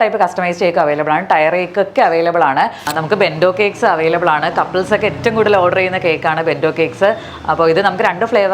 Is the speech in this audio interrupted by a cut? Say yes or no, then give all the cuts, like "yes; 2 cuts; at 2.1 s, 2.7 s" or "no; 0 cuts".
yes; 1 cut; at 2.8 s